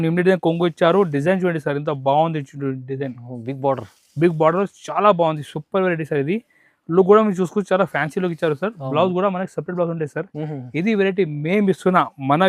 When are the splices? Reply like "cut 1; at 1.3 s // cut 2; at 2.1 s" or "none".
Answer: none

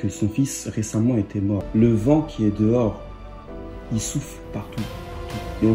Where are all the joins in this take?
cut 1; at 1.6 s

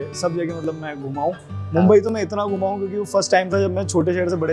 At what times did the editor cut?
none

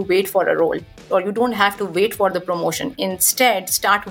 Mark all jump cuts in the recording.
cut 1; at 1.0 s

